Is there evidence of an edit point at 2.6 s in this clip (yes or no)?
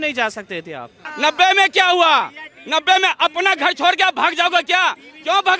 no